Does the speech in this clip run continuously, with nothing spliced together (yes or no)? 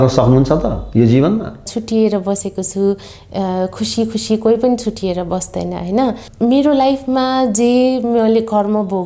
no